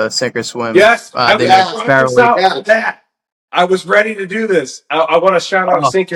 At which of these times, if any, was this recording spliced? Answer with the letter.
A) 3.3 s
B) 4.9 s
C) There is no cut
C